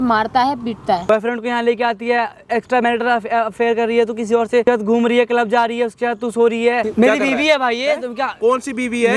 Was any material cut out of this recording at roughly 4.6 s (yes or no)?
yes